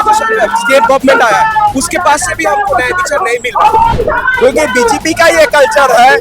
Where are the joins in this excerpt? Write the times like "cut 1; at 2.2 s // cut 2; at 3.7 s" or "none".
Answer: cut 1; at 4.0 s